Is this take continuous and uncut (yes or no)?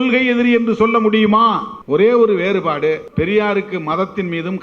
no